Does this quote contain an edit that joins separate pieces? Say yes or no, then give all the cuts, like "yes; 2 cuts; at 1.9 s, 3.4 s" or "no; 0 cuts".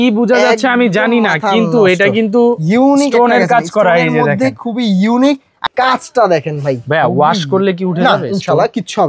yes; 1 cut; at 5.6 s